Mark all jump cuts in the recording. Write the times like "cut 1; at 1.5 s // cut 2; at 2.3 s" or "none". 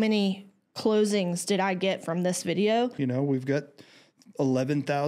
cut 1; at 2.9 s